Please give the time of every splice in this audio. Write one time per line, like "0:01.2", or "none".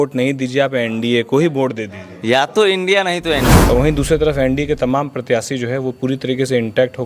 0:03.5

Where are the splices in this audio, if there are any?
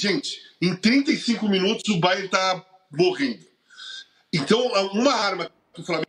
none

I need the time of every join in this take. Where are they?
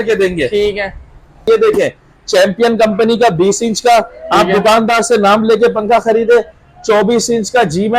0:01.5

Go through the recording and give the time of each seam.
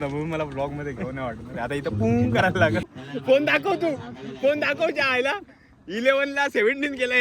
0:02.9

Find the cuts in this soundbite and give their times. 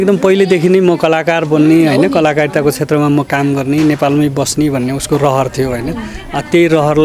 none

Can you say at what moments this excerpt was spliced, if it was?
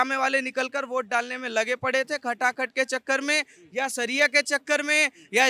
none

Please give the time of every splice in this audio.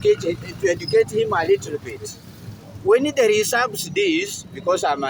none

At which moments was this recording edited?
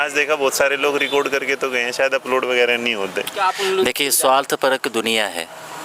0:03.3

